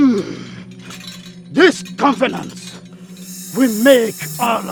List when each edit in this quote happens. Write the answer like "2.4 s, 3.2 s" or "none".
none